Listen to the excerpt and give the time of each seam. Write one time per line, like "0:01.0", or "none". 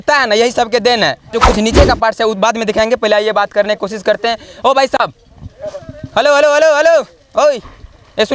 0:01.3